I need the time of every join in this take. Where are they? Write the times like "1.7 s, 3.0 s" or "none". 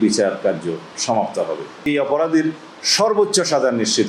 1.9 s